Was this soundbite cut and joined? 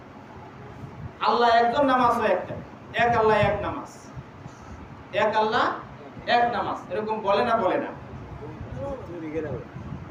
no; 0 cuts

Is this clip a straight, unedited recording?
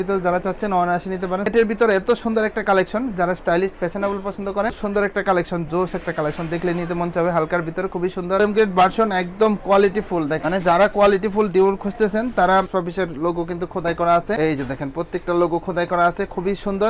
no; 4 cuts; at 1.5 s, 4.8 s, 8.4 s, 12.7 s

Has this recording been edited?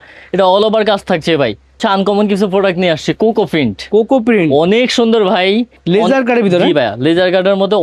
yes; 2 cuts; at 1.8 s, 5.8 s

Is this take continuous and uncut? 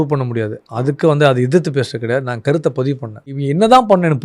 no; 1 cut; at 3.3 s

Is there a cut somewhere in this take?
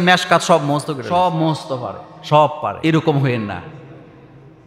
yes; 2 cuts; at 1.0 s, 2.8 s

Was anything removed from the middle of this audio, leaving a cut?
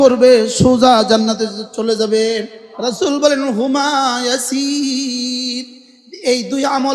yes; 1 cut; at 2.6 s

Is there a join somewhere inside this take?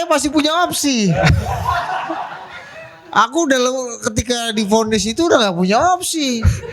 no; 0 cuts

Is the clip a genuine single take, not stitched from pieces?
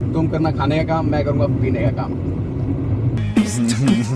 yes; 0 cuts

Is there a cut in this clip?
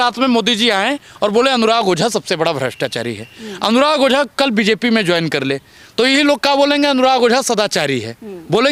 no; 0 cuts

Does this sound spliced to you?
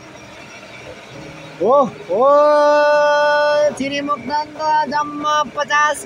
no; 0 cuts

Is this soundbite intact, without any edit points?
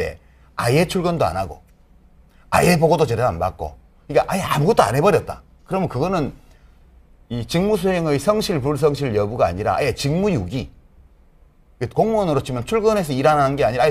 no; 1 cut; at 9.0 s

